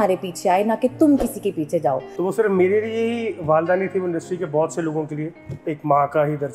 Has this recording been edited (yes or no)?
yes